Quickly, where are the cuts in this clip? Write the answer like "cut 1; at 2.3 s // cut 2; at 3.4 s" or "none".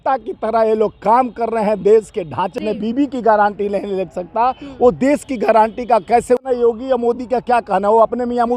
cut 1; at 2.6 s // cut 2; at 6.4 s

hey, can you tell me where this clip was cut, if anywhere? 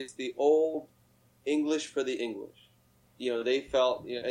cut 1; at 3.1 s

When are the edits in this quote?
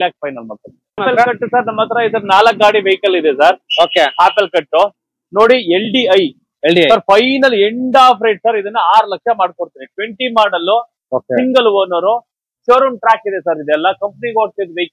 cut 1; at 1.0 s

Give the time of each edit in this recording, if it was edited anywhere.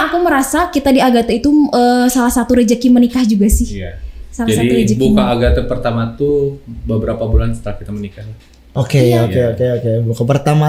none

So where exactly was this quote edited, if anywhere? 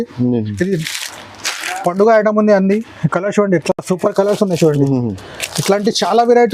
none

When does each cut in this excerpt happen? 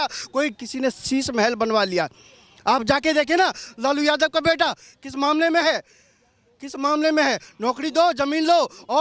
none

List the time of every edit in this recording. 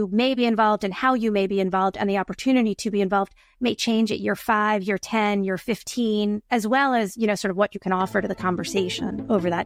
none

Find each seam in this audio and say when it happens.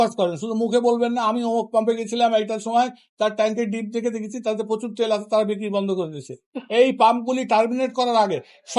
none

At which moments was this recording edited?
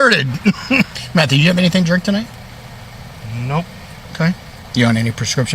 cut 1; at 1.0 s // cut 2; at 4.5 s

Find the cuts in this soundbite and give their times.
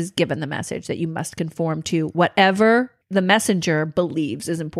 cut 1; at 3.0 s

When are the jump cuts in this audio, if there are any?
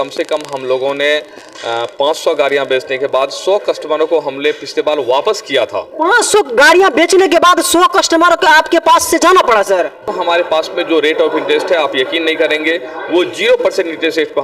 cut 1; at 10.0 s

